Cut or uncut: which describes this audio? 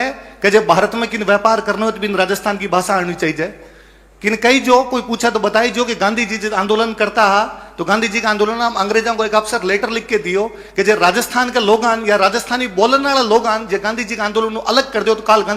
uncut